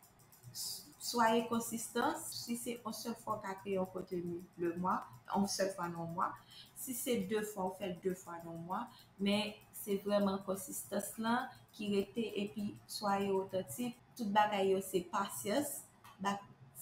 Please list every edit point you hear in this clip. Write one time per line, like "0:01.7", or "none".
0:02.3
0:05.2
0:14.0